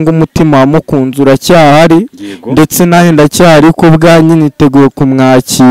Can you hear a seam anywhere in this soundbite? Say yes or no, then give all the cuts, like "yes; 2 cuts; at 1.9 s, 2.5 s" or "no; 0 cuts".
no; 0 cuts